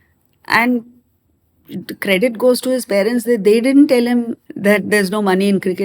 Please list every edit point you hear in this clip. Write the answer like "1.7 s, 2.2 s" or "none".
4.4 s